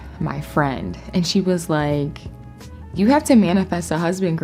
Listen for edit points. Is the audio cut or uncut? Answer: uncut